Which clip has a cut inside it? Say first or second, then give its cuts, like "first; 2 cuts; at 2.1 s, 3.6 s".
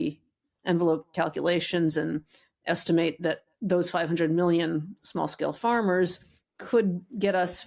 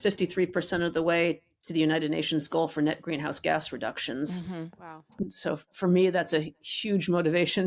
second; 1 cut; at 5.3 s